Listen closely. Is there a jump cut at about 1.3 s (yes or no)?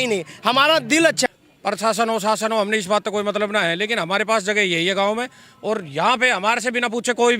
yes